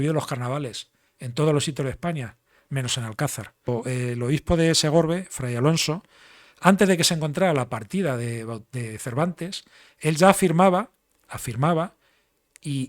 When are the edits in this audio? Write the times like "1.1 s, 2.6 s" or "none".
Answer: 3.6 s

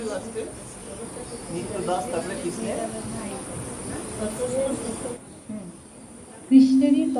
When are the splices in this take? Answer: 5.1 s

